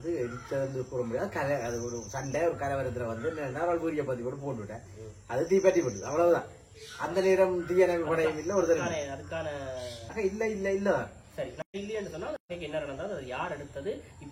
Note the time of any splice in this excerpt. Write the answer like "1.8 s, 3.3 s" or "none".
10.0 s